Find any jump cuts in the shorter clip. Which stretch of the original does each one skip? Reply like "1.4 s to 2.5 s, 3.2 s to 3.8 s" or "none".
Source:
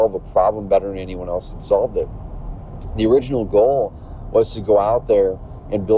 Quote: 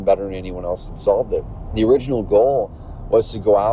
2.2 s to 2.8 s

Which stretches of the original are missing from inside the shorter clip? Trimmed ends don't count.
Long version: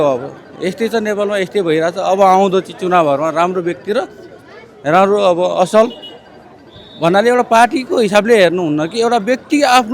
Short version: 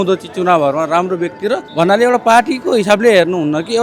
4.1 s to 6.9 s

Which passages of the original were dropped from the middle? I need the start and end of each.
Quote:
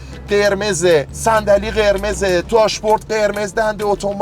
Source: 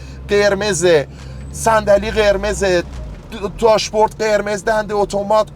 1.1 s to 1.5 s, 2.9 s to 3.6 s

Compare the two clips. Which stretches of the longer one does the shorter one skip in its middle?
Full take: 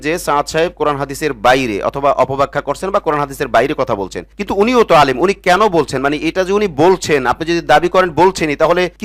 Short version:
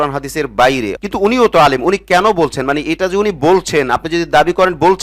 1.8 s to 4.3 s

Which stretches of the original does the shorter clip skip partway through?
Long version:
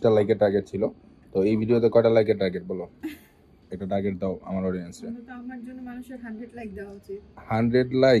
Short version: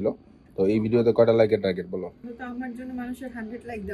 3.0 s to 5.1 s

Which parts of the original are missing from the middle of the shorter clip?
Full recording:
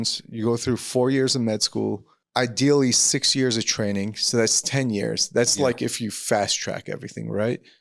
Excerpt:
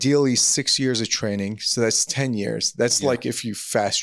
none

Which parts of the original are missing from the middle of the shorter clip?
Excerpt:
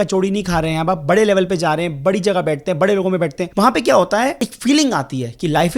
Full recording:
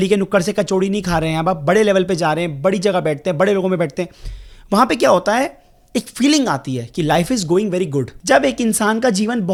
4.0 s to 4.6 s, 5.6 s to 6.0 s

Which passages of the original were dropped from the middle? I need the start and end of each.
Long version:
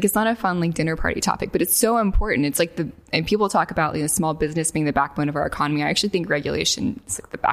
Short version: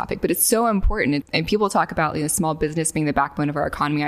2.5 s to 3.0 s

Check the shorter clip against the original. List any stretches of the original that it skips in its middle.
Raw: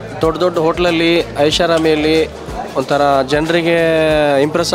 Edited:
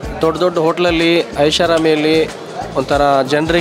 none

